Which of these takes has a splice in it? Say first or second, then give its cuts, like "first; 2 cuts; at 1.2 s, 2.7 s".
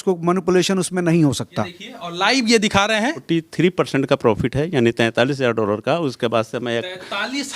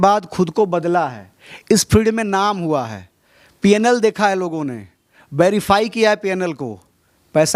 first; 2 cuts; at 1.8 s, 3.2 s